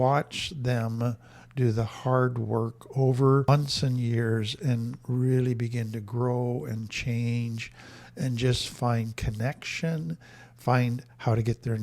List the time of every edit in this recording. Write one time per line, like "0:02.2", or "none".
0:03.5